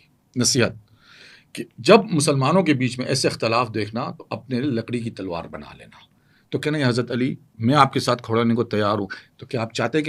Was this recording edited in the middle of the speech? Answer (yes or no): no